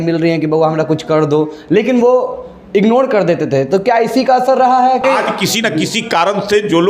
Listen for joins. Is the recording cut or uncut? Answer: cut